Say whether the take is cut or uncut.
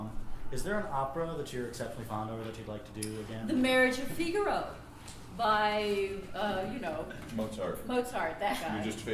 cut